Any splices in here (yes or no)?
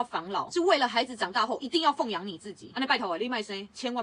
no